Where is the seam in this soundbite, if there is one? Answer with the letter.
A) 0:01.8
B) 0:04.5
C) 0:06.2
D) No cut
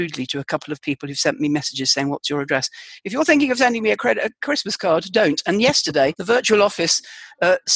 C